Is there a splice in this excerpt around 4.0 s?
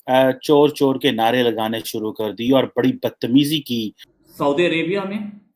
yes; 1 cut; at 4.0 s

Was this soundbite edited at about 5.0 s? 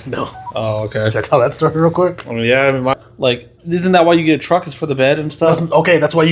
no; 1 cut; at 2.9 s

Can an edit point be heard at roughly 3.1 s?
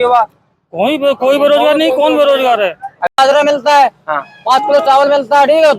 yes; 1 cut; at 3.1 s

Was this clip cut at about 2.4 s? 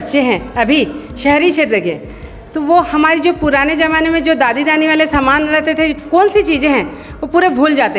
no; 0 cuts

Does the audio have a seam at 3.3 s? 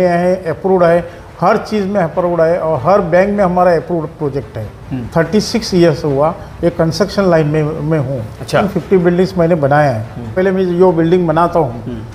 no; 3 cuts; at 5.0 s, 8.7 s, 10.3 s

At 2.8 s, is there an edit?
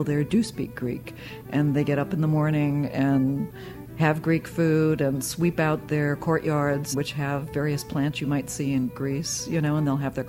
no; 1 cut; at 6.9 s

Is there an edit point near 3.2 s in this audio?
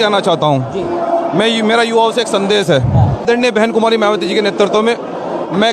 yes; 1 cut; at 3.2 s

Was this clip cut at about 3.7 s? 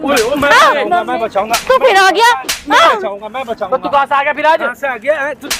no; 0 cuts

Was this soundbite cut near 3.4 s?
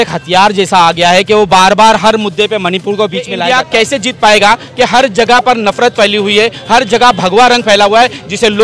yes; 1 cut; at 3.4 s

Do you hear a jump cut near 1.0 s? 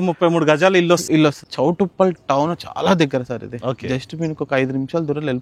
yes; 1 cut; at 1.0 s

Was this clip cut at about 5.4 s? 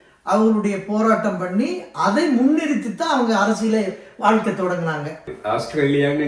yes; 1 cut; at 5.4 s

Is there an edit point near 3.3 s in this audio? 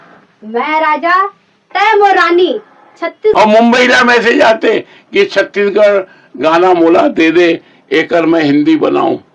yes; 1 cut; at 3.3 s

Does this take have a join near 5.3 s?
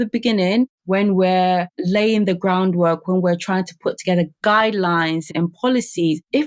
yes; 1 cut; at 5.3 s

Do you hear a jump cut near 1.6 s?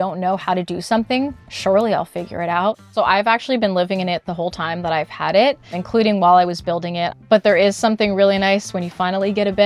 no; 3 cuts; at 2.8 s, 5.7 s, 7.2 s

